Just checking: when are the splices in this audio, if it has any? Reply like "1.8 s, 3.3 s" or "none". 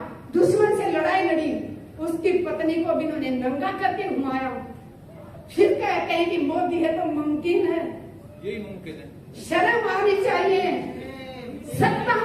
none